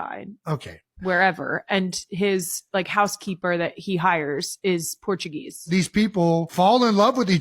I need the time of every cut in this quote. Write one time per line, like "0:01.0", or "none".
0:05.7
0:06.5